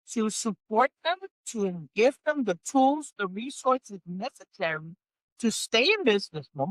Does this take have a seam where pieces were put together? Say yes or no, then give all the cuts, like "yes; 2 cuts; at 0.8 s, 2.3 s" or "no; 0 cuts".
no; 0 cuts